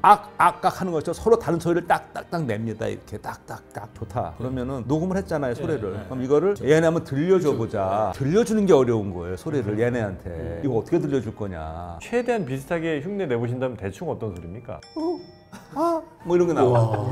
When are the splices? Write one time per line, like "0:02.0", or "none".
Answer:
0:03.8
0:08.1
0:12.0
0:14.9